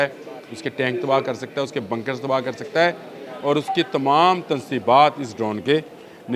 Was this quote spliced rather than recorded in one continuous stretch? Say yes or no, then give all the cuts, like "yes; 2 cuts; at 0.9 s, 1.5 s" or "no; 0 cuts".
no; 0 cuts